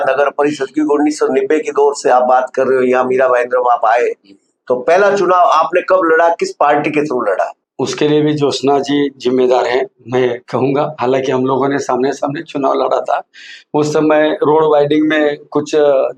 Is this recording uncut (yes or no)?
no